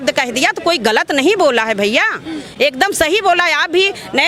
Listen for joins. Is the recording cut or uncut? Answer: uncut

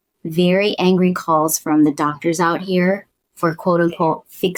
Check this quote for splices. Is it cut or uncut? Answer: uncut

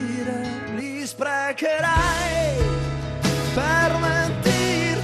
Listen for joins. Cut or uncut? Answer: uncut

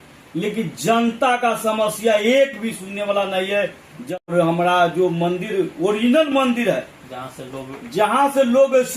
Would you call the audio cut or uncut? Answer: cut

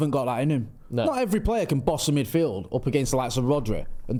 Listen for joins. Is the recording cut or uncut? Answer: uncut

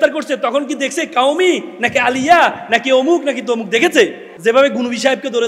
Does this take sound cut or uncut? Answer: cut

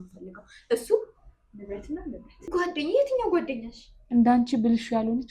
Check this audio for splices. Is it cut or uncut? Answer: cut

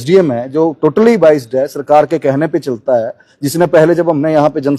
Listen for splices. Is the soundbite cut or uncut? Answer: uncut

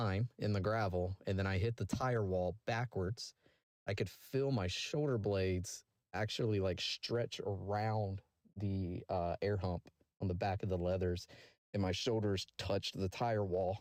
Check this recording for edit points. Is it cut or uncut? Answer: uncut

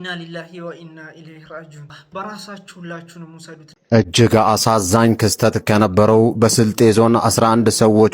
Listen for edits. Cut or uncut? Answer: cut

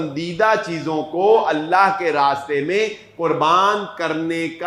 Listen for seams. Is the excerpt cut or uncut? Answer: uncut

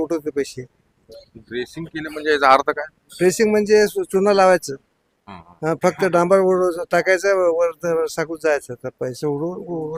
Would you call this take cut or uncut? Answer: uncut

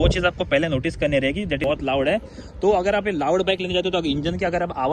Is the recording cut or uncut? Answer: cut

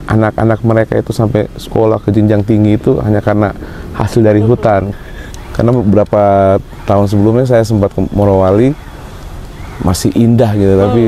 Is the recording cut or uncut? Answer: cut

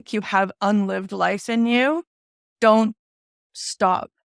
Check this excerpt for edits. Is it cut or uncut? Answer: uncut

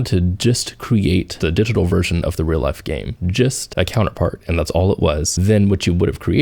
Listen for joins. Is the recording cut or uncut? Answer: uncut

